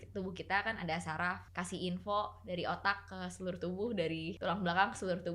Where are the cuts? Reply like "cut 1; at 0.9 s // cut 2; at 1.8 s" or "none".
cut 1; at 1.5 s // cut 2; at 4.3 s